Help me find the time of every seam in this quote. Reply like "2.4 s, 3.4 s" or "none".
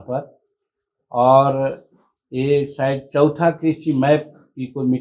none